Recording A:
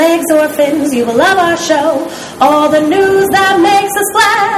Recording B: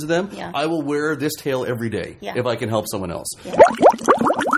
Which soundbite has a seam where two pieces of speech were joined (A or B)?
B